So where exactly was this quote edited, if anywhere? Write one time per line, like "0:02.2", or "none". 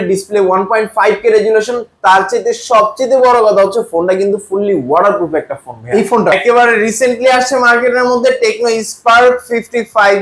0:06.3